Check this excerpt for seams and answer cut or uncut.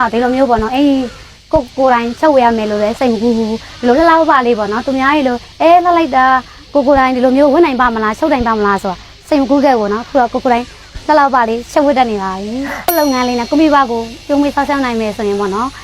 cut